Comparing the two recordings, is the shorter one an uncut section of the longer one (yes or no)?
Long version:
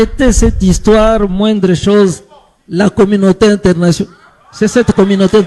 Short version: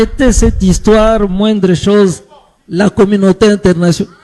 yes